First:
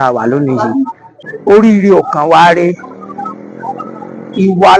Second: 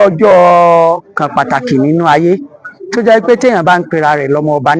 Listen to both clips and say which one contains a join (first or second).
first